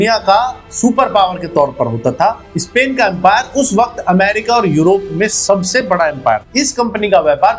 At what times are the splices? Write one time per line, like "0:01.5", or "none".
0:06.5